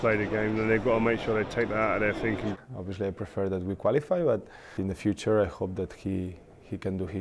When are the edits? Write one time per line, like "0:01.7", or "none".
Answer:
0:02.6
0:04.7